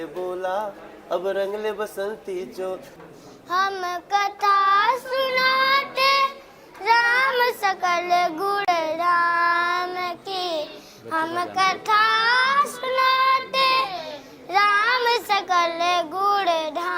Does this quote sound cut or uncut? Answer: cut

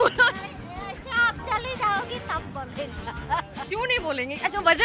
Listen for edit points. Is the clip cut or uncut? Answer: cut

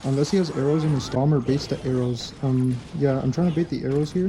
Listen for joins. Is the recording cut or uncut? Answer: cut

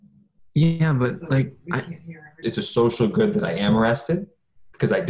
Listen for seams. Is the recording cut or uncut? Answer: cut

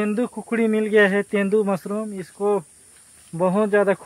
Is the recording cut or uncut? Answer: uncut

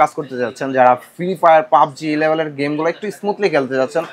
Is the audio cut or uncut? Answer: uncut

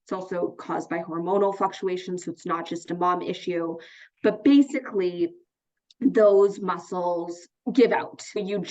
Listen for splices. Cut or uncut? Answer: uncut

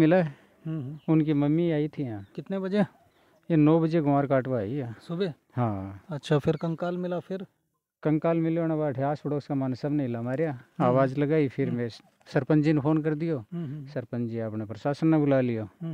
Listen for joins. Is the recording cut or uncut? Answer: uncut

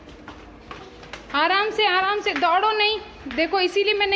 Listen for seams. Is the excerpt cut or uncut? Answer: uncut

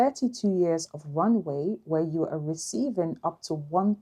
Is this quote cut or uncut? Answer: uncut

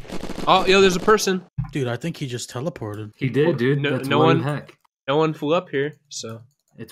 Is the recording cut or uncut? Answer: cut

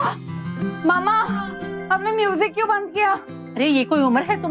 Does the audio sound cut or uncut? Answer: uncut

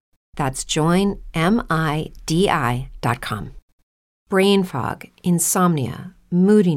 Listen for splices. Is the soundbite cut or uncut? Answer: cut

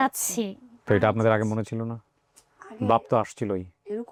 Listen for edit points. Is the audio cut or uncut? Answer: uncut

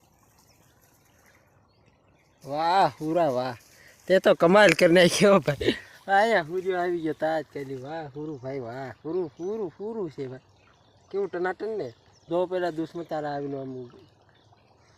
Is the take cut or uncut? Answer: uncut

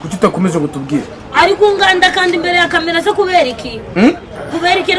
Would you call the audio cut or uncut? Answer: uncut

